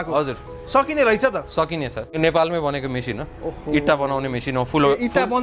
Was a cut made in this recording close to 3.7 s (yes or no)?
no